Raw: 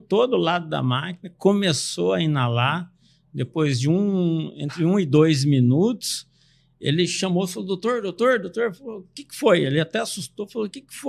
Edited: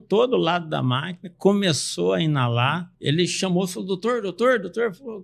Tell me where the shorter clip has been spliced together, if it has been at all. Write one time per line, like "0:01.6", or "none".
0:02.9